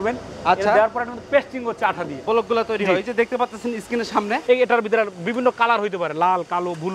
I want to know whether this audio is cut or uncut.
cut